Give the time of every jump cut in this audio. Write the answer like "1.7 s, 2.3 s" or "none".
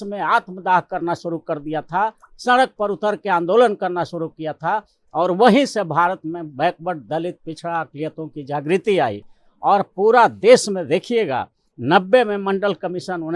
none

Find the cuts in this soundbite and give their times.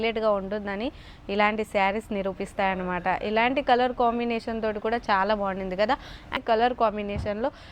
6.3 s

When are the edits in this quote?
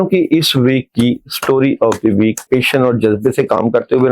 2.4 s

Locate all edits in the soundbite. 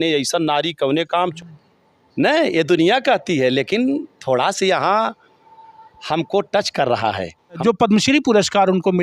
1.3 s, 7.6 s

